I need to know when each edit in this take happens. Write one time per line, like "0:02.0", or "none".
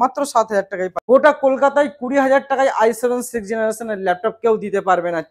0:01.0